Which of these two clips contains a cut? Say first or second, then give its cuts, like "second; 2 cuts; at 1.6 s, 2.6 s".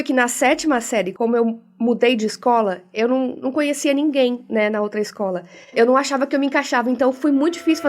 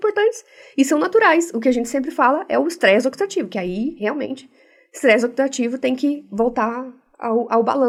first; 2 cuts; at 1.1 s, 5.7 s